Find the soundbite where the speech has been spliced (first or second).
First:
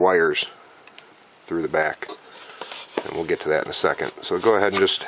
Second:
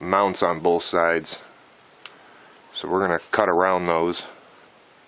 second